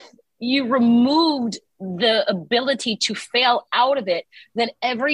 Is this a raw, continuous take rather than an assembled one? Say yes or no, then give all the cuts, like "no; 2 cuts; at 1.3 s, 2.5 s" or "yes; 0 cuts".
yes; 0 cuts